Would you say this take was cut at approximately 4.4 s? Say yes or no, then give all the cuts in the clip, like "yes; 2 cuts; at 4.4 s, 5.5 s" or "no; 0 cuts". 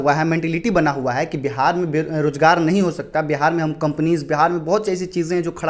no; 0 cuts